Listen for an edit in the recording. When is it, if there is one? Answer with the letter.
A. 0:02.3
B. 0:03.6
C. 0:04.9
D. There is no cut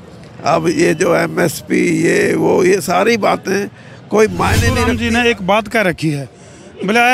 C